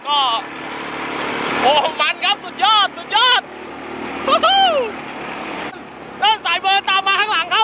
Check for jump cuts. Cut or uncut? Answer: uncut